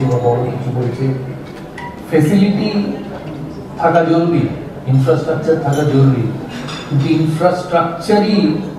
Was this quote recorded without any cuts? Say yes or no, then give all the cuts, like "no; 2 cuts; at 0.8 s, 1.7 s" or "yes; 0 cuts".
yes; 0 cuts